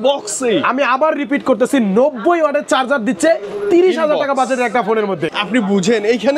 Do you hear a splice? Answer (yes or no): yes